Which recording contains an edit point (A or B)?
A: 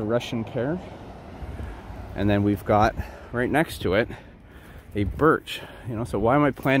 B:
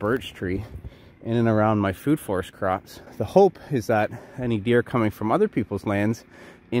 B